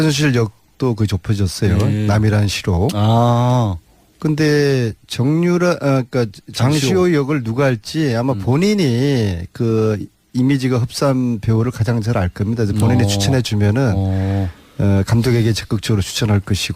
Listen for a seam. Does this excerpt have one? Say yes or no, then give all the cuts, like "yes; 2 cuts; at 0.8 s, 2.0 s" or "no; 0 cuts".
yes; 1 cut; at 12.5 s